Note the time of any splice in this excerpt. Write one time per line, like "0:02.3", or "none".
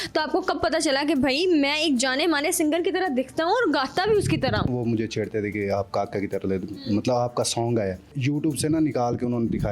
0:04.7
0:08.2